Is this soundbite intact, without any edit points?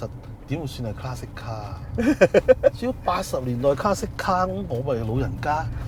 yes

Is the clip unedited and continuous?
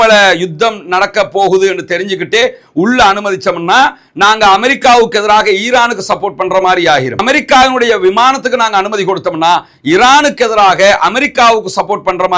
yes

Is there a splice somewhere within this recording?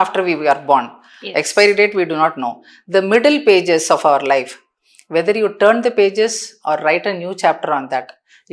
no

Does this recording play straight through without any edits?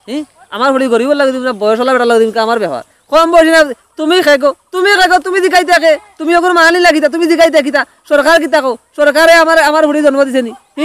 yes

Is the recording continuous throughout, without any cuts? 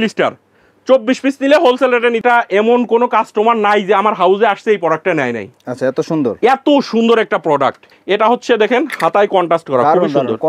no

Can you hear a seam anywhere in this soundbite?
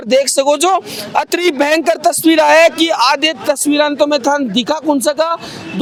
no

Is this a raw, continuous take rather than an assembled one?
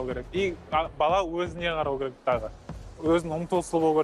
yes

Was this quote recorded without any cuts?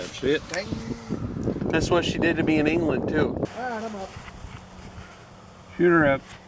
no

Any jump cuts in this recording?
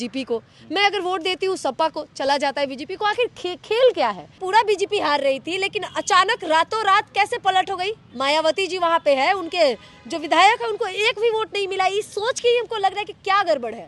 yes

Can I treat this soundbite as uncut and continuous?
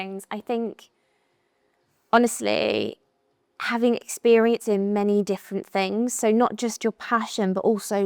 yes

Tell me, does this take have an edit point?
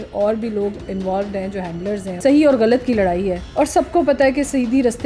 yes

